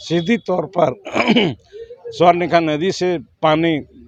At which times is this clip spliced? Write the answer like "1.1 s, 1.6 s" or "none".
none